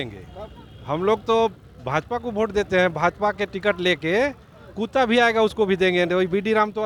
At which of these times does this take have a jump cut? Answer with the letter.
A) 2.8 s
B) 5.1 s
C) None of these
C